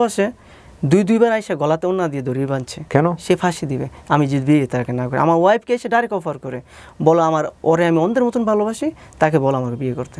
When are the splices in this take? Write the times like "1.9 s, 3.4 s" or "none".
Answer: none